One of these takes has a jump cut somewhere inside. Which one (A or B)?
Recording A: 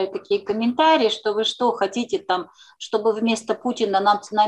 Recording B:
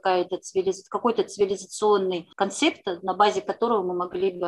B